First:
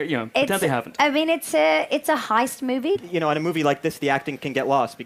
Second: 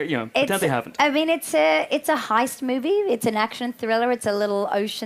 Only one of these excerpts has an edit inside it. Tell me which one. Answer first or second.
second